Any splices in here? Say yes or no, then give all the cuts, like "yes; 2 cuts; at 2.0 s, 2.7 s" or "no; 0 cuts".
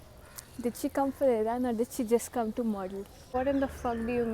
yes; 1 cut; at 3.1 s